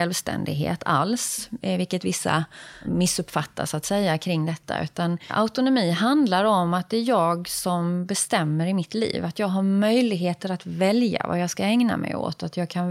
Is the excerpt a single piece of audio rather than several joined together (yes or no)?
no